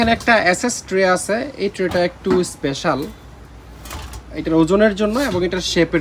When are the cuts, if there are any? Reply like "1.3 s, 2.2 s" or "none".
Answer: none